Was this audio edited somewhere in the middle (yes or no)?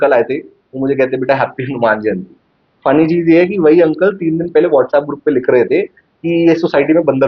no